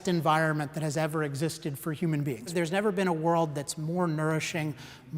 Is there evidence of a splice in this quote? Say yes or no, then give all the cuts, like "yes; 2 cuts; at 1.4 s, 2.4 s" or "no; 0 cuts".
yes; 1 cut; at 2.5 s